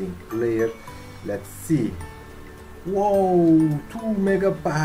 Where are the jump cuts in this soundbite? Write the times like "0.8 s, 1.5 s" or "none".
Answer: none